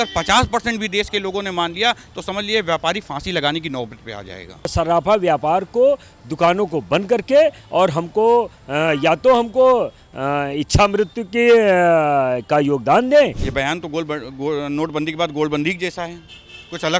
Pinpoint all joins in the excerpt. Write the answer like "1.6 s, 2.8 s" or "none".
4.7 s, 13.4 s